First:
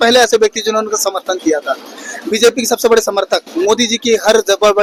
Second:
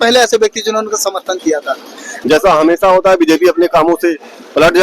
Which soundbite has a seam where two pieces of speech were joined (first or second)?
second